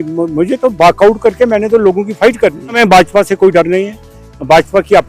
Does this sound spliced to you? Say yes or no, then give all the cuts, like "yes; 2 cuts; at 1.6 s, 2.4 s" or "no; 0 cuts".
yes; 1 cut; at 2.8 s